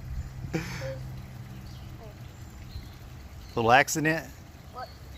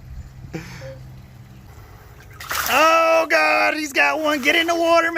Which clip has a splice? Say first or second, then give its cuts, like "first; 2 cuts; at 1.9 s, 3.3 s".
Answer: second; 1 cut; at 1.7 s